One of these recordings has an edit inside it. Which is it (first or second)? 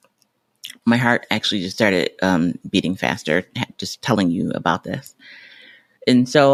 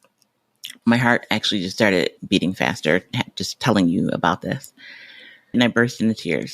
second